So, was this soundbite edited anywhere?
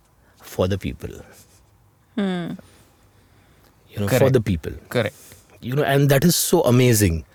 no; 0 cuts

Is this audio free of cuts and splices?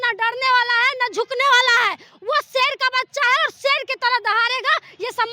yes; 0 cuts

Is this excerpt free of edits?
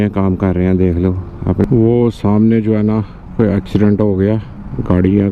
no; 1 cut; at 1.6 s

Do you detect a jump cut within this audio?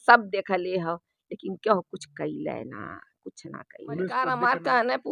yes; 1 cut; at 4.1 s

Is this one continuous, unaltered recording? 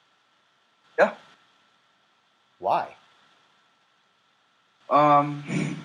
no; 1 cut; at 4.8 s

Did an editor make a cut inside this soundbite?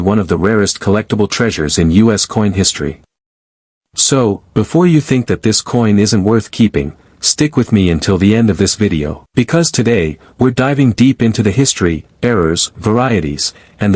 yes; 1 cut; at 9.2 s

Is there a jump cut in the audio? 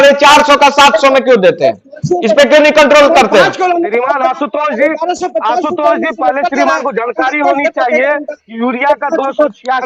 no; 0 cuts

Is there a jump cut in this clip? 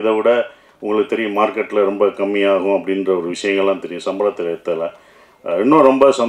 no; 0 cuts

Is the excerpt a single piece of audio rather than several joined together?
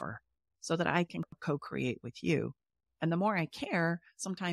no; 1 cut; at 1.3 s

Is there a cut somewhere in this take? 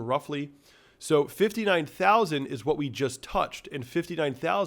no; 0 cuts

